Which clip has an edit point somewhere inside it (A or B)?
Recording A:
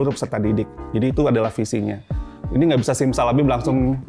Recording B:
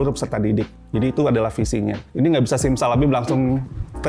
B